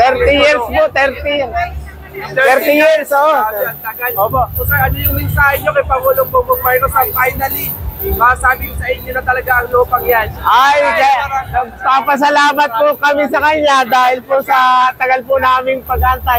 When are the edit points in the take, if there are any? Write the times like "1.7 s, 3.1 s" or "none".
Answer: none